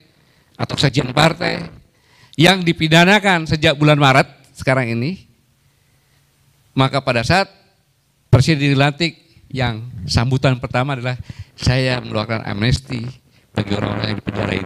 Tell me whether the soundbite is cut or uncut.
uncut